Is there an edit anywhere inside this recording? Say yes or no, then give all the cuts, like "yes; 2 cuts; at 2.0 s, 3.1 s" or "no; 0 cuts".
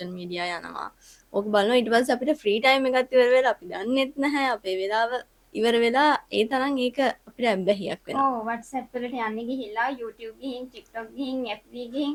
no; 0 cuts